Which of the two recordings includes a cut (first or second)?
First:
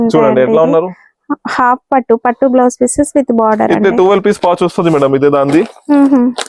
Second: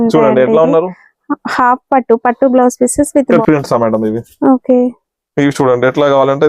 second